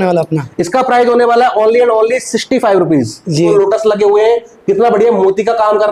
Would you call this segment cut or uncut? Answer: cut